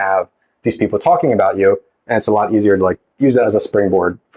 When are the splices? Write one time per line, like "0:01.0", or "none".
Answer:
none